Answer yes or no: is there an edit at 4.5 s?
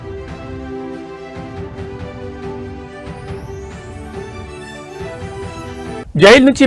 yes